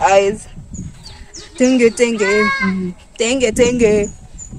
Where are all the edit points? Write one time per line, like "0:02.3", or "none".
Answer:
none